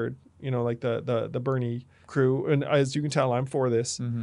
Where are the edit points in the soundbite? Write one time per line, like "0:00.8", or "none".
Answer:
0:02.0